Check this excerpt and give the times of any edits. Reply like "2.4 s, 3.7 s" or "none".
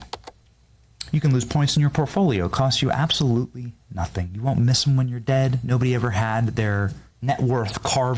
7.1 s